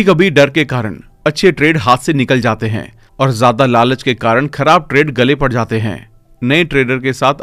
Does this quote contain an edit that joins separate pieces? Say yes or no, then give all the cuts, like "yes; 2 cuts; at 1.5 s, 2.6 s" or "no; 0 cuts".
no; 0 cuts